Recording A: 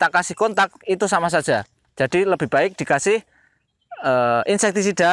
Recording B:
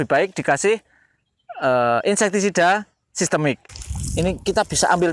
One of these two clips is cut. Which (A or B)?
B